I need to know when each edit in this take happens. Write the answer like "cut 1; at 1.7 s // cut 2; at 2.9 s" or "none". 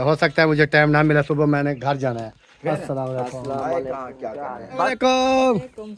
cut 1; at 4.9 s

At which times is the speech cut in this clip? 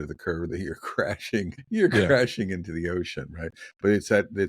cut 1; at 1.6 s

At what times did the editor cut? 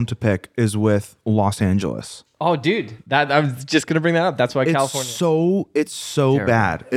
none

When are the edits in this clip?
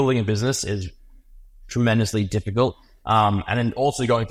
none

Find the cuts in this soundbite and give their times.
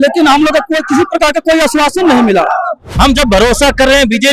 cut 1; at 2.8 s

